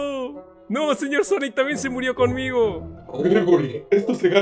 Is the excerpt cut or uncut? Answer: uncut